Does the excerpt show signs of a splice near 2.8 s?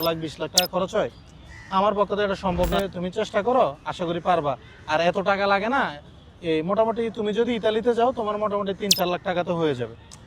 yes; 1 cut; at 2.8 s

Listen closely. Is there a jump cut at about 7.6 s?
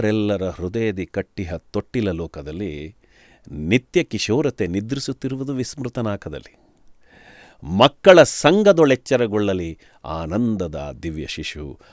no; 0 cuts

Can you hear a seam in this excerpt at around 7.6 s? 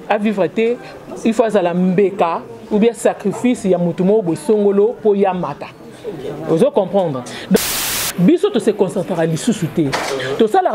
yes; 1 cut; at 7.6 s

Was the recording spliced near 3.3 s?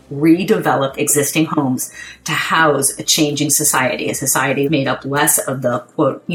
no; 1 cut; at 4.7 s

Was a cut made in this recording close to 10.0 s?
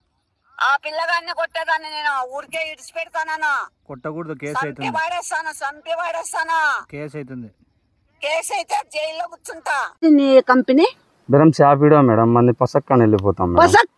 yes; 1 cut; at 10.0 s

